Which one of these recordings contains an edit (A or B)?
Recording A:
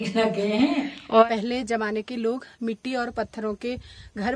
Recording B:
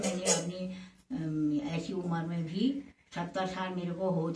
A